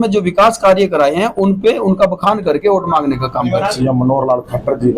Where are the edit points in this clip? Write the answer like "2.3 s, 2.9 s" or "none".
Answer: 3.7 s